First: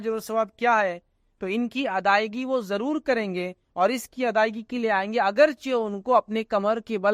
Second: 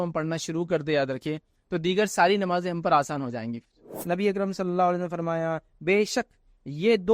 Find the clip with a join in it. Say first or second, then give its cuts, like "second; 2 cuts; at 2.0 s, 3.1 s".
second; 1 cut; at 3.9 s